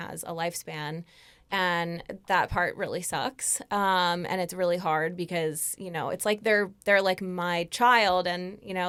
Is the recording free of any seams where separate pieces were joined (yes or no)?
yes